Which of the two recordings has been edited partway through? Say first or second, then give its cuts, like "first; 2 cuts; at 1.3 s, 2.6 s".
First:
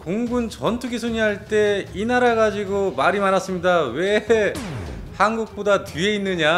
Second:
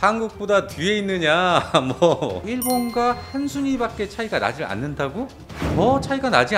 second; 2 cuts; at 2.4 s, 5.4 s